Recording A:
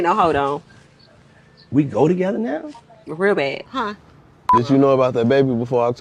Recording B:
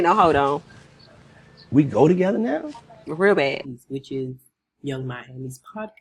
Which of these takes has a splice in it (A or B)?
A